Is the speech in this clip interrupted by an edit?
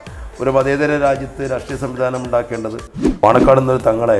yes; 1 cut; at 3.2 s

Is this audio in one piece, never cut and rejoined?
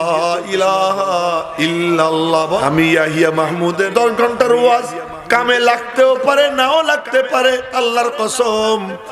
no; 2 cuts; at 2.6 s, 3.8 s

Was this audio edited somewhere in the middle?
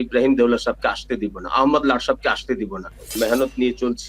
yes; 1 cut; at 3.2 s

